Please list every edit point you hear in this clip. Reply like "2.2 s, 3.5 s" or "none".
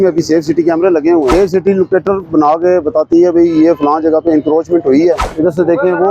1.3 s, 5.3 s